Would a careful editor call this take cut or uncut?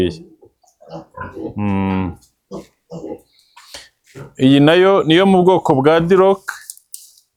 uncut